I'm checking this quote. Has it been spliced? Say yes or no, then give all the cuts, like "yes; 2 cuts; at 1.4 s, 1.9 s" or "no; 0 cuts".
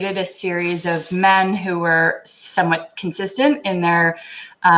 no; 0 cuts